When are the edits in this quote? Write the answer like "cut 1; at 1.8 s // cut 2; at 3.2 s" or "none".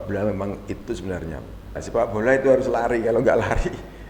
cut 1; at 1.8 s